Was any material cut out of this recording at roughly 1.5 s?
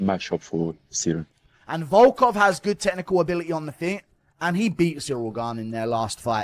yes; 1 cut; at 1.5 s

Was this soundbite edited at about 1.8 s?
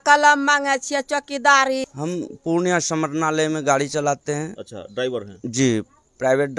yes; 1 cut; at 1.8 s

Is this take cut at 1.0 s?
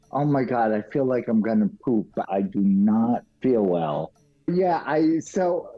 no; 3 cuts; at 2.2 s, 3.3 s, 4.5 s

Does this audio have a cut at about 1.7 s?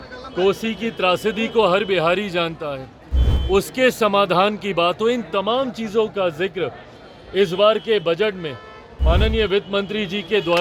no; 0 cuts

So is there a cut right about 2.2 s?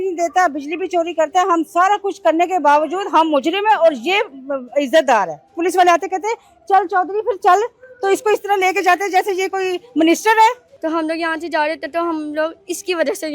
no; 2 cuts; at 5.6 s, 10.7 s

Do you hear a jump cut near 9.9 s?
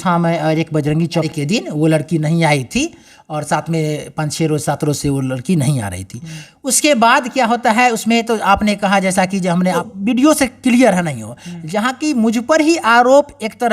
yes; 2 cuts; at 1.3 s, 9.9 s

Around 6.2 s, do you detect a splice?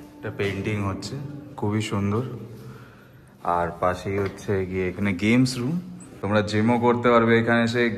yes; 1 cut; at 6.2 s

